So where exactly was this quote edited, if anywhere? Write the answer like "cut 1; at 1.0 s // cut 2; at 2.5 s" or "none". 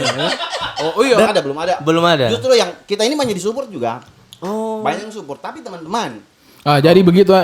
cut 1; at 1.3 s